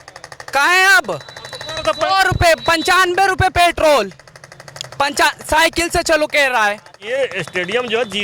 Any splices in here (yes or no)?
yes